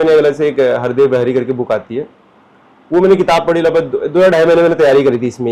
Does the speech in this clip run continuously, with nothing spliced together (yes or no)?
yes